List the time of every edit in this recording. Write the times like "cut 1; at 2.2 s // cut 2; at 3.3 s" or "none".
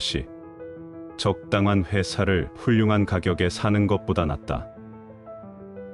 cut 1; at 5.0 s